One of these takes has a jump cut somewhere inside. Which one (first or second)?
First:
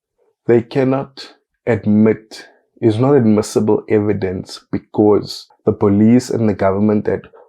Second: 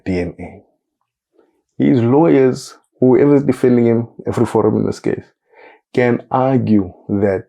first